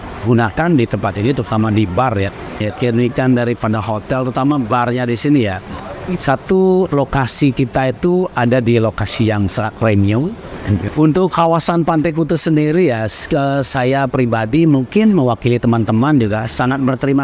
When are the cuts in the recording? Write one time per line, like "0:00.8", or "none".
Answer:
0:02.7
0:10.8